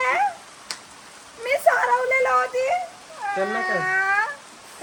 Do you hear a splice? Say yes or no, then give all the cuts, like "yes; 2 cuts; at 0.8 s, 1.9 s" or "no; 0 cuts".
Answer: no; 0 cuts